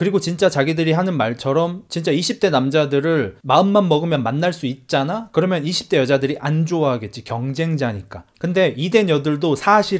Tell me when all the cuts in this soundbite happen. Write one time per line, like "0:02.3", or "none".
none